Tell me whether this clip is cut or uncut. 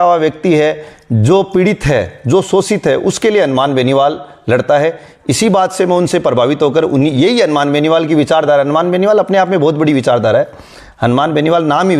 uncut